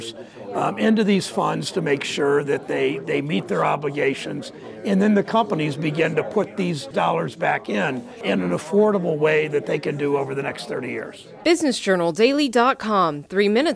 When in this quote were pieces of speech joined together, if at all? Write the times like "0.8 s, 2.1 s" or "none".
6.9 s, 8.2 s, 11.2 s